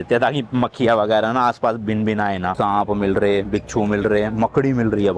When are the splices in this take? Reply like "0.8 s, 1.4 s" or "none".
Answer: 2.5 s